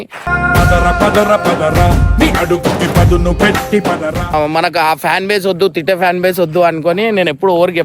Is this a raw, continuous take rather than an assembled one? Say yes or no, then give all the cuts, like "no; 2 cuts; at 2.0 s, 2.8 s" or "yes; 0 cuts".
no; 1 cut; at 4.3 s